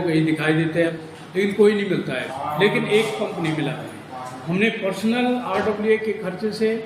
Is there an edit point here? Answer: yes; 2 cuts; at 0.9 s, 2.2 s

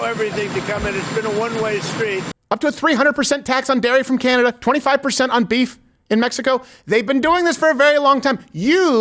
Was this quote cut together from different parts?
yes; 1 cut; at 2.3 s

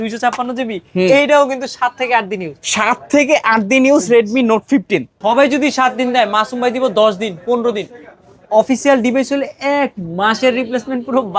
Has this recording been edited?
yes; 1 cut; at 5.1 s

